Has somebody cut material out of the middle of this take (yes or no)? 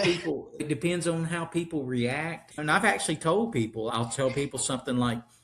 yes